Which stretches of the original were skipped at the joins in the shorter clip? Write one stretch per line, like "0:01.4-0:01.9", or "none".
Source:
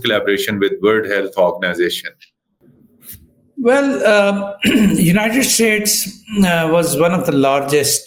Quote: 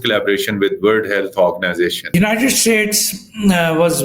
0:02.1-0:05.1